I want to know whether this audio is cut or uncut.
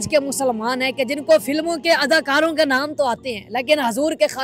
uncut